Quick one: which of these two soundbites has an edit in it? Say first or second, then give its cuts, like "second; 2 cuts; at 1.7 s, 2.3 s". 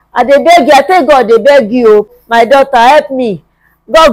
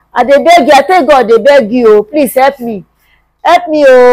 first; 1 cut; at 2.1 s